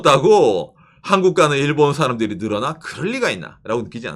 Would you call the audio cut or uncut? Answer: uncut